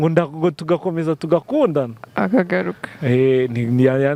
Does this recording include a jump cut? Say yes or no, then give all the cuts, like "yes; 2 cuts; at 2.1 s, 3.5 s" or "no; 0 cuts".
no; 0 cuts